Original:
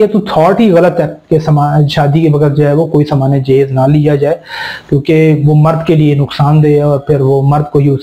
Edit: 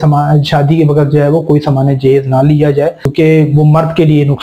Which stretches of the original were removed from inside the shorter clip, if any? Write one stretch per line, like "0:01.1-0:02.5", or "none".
0:04.5-0:04.9